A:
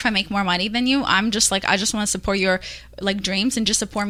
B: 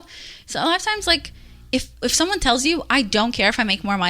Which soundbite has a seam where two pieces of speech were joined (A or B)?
B